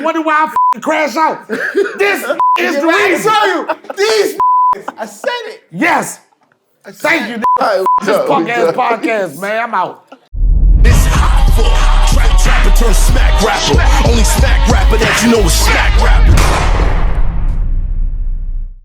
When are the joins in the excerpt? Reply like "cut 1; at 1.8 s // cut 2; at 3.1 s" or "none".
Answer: cut 1; at 10.1 s